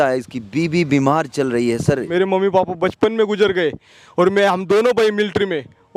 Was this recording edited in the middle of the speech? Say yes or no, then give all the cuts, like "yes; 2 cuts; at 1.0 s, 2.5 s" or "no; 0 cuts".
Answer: yes; 1 cut; at 2.1 s